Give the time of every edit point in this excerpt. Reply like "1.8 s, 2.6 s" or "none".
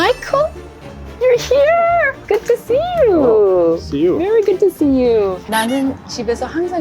2.2 s, 5.4 s